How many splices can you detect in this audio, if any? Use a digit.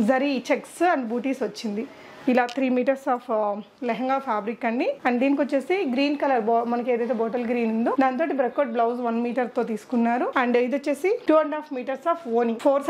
0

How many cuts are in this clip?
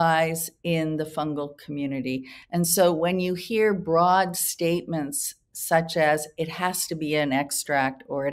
0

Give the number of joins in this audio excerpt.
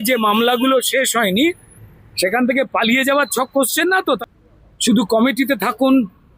1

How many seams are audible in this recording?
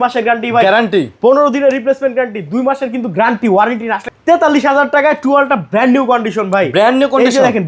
1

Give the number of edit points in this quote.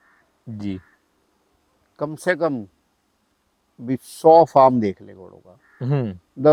0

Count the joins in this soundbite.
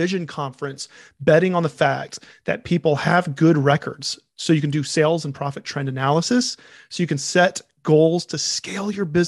0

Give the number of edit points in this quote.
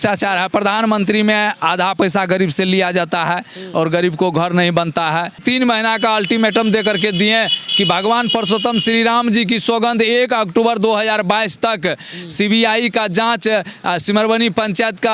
1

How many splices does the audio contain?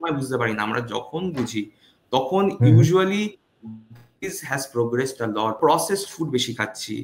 1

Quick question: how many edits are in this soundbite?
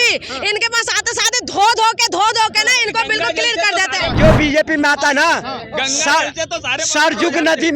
1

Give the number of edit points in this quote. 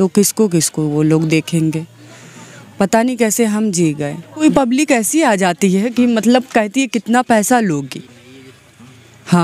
1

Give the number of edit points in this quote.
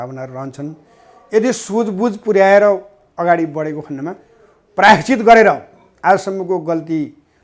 0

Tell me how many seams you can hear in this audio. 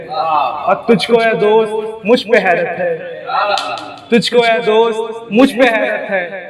0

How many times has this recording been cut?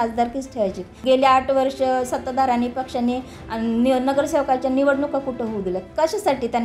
1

